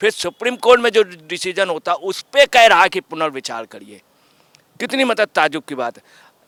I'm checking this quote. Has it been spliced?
no; 0 cuts

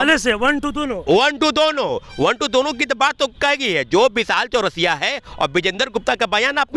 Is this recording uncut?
yes; 0 cuts

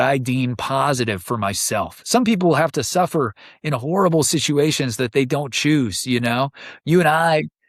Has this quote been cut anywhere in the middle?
no; 0 cuts

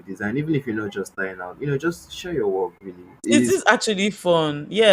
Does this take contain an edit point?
yes; 1 cut; at 3.2 s

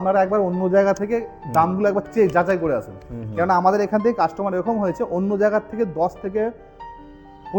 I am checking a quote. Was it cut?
no; 0 cuts

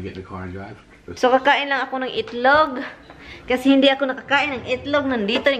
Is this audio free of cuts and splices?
no; 1 cut; at 1.0 s

